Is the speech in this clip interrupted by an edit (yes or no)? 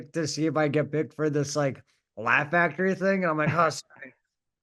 no